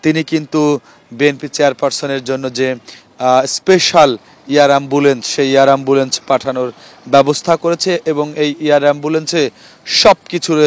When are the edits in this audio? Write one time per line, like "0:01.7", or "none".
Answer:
none